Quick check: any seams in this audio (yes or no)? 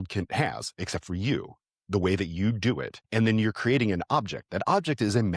yes